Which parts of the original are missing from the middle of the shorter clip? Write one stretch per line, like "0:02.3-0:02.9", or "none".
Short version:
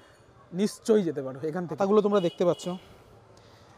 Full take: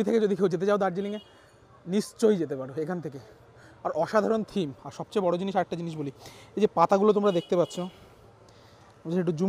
0:03.1-0:06.9